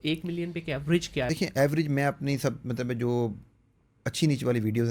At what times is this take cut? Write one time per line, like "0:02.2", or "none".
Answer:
0:01.3